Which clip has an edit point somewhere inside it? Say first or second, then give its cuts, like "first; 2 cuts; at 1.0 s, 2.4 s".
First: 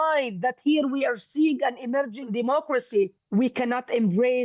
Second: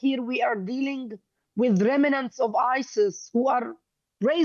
first; 2 cuts; at 2.3 s, 3.2 s